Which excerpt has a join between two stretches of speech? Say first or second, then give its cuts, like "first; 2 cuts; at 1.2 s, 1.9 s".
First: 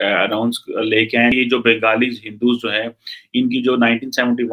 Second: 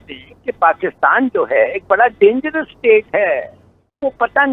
first; 1 cut; at 1.3 s